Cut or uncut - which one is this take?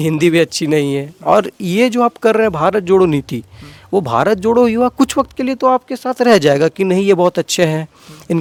uncut